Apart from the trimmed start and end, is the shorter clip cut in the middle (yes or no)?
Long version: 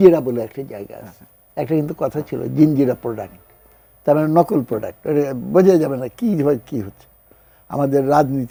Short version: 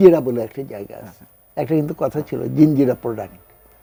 no